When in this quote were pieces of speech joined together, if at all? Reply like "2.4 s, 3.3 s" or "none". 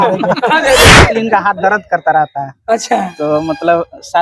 1.0 s